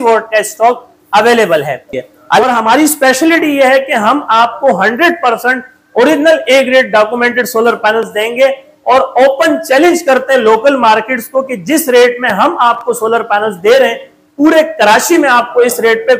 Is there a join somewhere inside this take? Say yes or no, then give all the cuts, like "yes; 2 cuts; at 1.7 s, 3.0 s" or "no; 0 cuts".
yes; 1 cut; at 2.4 s